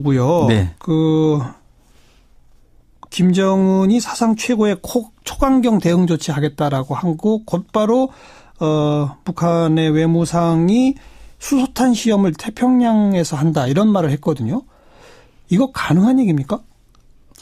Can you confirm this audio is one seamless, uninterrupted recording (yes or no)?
no